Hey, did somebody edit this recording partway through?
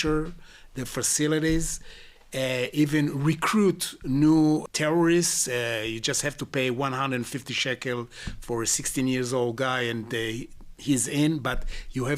yes; 1 cut; at 4.6 s

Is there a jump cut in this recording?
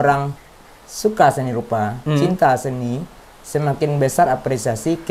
no; 0 cuts

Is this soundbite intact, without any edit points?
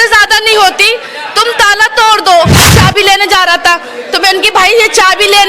no; 1 cut; at 2.7 s

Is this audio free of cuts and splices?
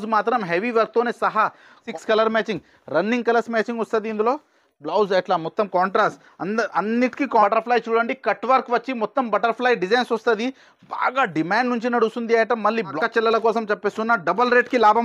no; 3 cuts; at 1.8 s, 7.4 s, 12.9 s

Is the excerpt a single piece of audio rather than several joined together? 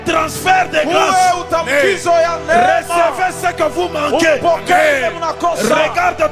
yes; 0 cuts

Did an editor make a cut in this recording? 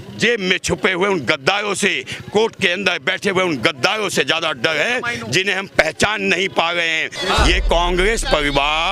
yes; 1 cut; at 7.1 s

